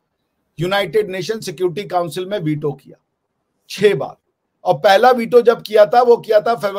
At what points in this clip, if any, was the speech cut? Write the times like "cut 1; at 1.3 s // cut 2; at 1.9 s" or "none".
none